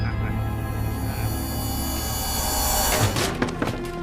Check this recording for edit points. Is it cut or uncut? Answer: cut